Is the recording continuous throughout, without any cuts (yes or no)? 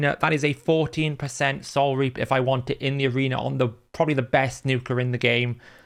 yes